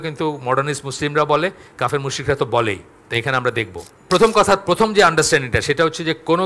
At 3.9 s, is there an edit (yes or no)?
yes